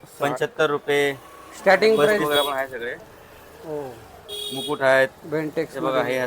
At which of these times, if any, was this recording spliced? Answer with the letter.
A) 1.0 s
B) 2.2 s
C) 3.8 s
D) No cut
B